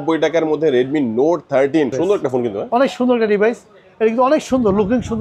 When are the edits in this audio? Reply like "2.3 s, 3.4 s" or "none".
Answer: 1.9 s